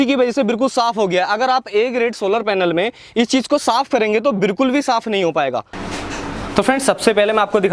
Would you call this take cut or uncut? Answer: cut